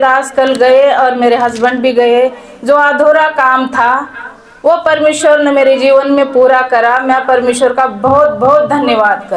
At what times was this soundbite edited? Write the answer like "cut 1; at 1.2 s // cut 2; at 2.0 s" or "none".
none